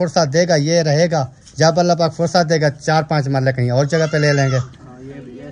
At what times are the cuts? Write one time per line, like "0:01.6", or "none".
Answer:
none